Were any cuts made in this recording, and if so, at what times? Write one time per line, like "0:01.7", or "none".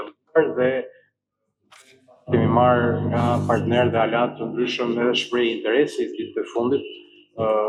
none